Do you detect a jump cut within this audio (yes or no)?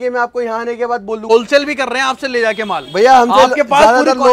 yes